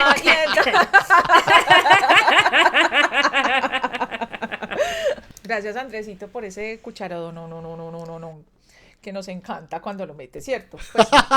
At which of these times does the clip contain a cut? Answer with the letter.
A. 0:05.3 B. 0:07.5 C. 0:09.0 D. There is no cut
A